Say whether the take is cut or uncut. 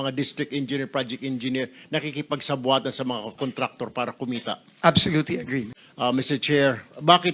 cut